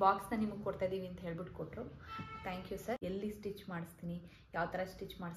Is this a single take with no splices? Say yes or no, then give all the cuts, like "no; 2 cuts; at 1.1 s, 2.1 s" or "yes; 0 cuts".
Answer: no; 1 cut; at 3.0 s